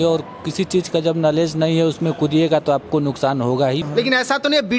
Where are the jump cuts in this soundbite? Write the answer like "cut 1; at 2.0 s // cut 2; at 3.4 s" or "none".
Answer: cut 1; at 3.9 s